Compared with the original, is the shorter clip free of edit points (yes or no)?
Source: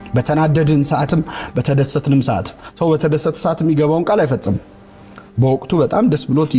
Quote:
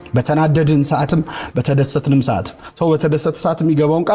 yes